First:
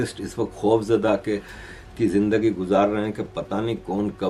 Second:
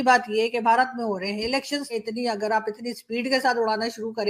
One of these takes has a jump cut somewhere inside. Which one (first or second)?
second